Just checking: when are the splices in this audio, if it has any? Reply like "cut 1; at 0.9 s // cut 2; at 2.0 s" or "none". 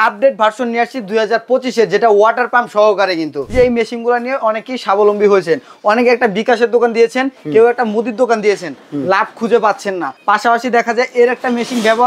cut 1; at 3.4 s // cut 2; at 10.1 s